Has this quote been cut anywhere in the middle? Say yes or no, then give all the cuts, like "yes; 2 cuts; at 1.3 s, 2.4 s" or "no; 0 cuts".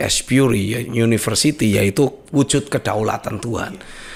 no; 0 cuts